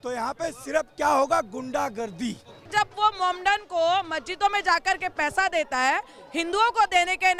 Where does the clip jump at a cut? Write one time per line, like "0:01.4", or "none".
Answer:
0:02.7

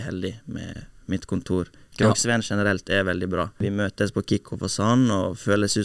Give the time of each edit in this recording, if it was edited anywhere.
0:03.6

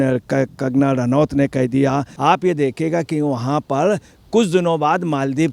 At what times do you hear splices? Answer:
0:02.1

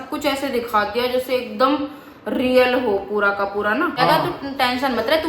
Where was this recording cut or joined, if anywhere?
0:04.0

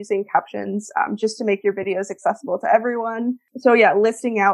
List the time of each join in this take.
0:03.5

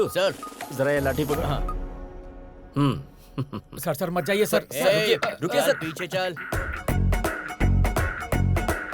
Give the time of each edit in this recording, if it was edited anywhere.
0:06.4

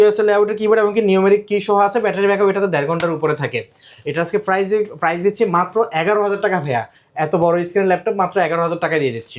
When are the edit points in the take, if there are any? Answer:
none

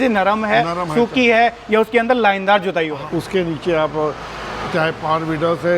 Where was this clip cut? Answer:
0:03.0

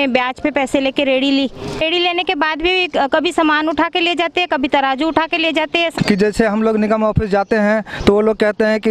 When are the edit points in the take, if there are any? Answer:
0:01.6
0:05.9

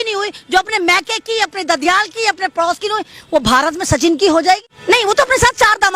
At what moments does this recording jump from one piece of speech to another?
0:04.7

